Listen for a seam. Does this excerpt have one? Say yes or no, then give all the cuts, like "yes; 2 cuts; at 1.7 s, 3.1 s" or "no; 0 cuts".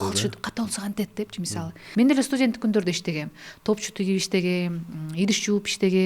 yes; 1 cut; at 1.8 s